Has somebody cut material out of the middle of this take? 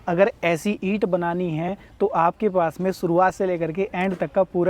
no; 0 cuts

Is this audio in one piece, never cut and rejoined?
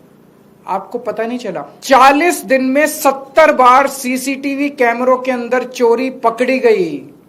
no; 1 cut; at 1.7 s

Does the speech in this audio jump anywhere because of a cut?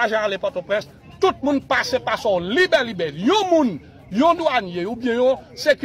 yes; 1 cut; at 1.0 s

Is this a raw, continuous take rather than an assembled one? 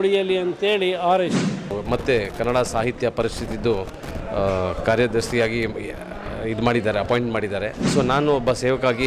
no; 1 cut; at 1.6 s

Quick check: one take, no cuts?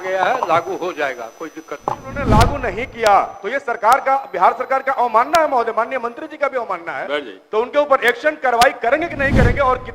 no; 1 cut; at 2.3 s

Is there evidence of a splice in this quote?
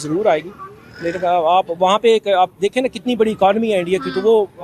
no; 0 cuts

